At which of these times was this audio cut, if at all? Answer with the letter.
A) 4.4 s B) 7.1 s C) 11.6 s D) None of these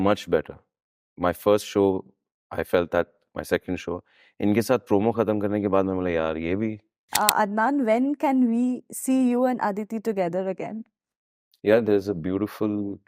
B